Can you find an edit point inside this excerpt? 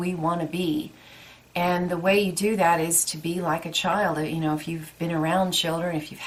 no; 0 cuts

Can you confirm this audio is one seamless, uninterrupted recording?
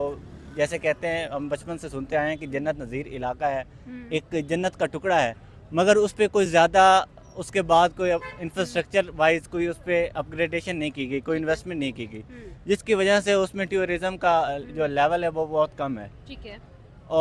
yes; 0 cuts

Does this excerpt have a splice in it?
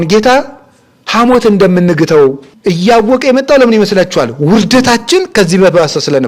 yes; 1 cut; at 2.5 s

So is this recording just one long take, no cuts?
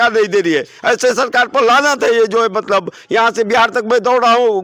yes; 0 cuts

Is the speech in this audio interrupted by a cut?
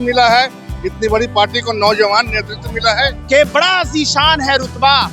yes; 1 cut; at 3.2 s

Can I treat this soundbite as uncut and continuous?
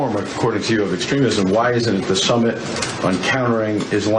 yes; 0 cuts

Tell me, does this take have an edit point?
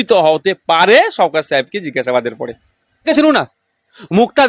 yes; 1 cut; at 3.1 s

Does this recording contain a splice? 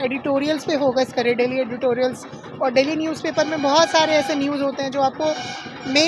no; 0 cuts

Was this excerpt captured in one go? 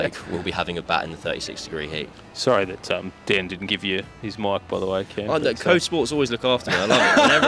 no; 1 cut; at 2.1 s

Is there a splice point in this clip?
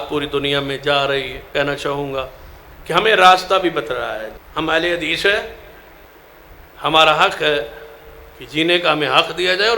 yes; 2 cuts; at 1.4 s, 4.4 s

